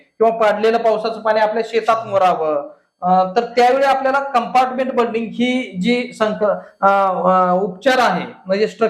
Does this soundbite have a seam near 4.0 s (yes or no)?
no